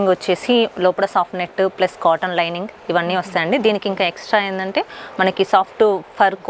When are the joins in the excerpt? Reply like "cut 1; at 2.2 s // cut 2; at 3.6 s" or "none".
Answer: none